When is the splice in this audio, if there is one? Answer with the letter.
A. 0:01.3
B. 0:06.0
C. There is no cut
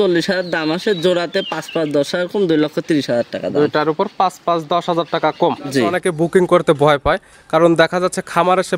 B